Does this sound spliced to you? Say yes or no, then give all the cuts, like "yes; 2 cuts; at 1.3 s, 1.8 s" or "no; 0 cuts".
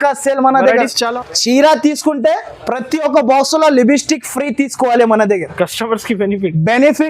yes; 1 cut; at 1.1 s